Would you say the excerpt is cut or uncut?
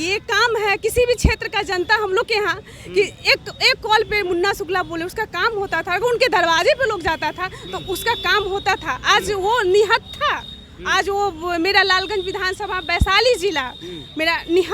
uncut